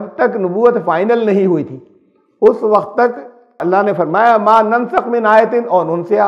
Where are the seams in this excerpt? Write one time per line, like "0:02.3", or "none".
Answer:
0:03.6

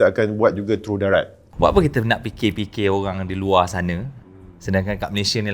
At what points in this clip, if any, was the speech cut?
0:01.4

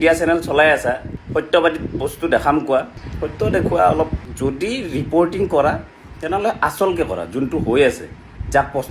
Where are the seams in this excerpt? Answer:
0:01.1
0:03.0
0:04.2

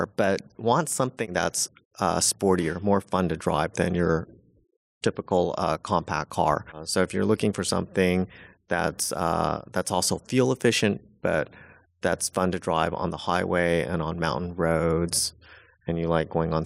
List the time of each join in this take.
0:01.3

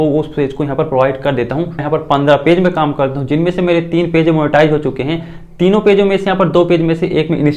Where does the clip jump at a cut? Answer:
0:01.8

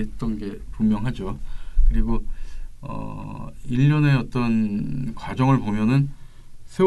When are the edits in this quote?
none

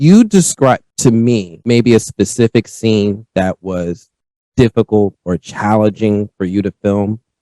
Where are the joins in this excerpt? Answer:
0:01.3

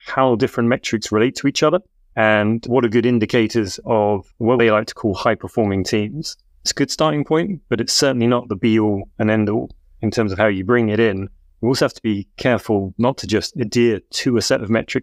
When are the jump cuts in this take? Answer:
0:02.0
0:03.9
0:06.7
0:10.0

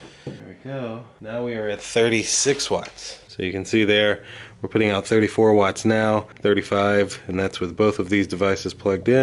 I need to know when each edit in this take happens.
0:01.1

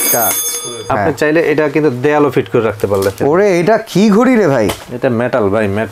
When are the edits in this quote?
0:00.9
0:03.2

